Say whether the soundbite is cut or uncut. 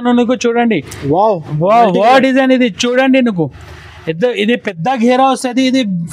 uncut